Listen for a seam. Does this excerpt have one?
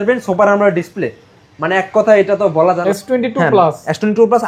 yes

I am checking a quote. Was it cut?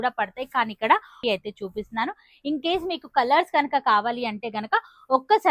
yes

